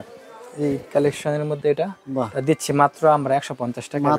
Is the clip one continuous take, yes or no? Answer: yes